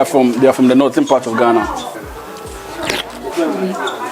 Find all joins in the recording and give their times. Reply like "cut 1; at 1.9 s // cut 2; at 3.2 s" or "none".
cut 1; at 2.0 s